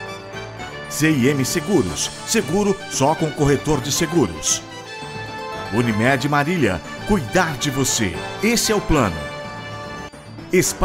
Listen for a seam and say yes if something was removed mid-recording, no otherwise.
yes